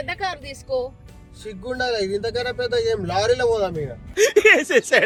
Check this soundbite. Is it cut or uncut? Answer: uncut